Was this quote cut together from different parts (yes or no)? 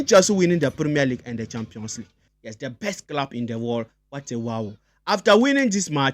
yes